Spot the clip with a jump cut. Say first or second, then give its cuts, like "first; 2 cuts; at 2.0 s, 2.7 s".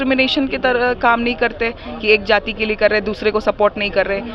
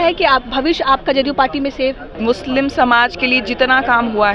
second; 1 cut; at 2.1 s